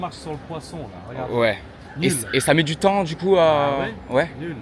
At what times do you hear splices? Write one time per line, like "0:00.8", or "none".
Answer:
none